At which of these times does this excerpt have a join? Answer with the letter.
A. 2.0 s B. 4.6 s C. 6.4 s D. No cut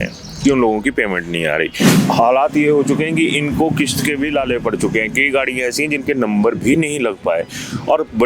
A